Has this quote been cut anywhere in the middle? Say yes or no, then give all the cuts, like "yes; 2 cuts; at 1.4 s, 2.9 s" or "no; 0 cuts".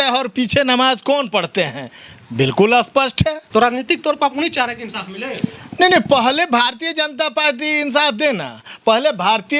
no; 0 cuts